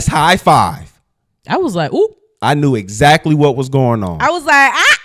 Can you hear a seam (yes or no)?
no